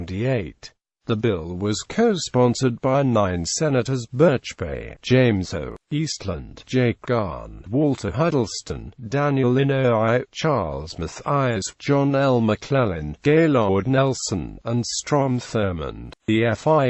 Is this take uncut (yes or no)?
no